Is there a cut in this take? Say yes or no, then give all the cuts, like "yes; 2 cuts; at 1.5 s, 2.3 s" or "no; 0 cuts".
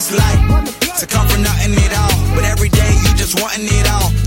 no; 0 cuts